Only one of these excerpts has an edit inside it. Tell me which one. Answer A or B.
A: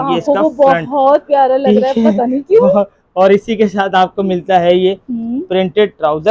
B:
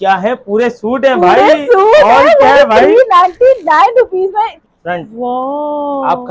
B